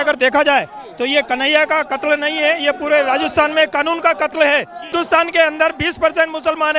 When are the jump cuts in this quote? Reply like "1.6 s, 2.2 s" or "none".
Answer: 4.9 s